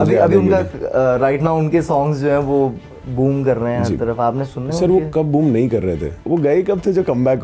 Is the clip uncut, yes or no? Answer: no